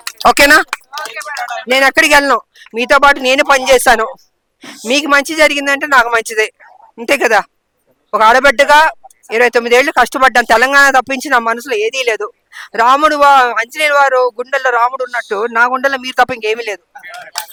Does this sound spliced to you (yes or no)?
no